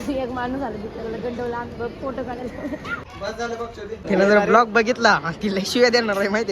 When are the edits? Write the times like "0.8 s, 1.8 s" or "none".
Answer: 3.6 s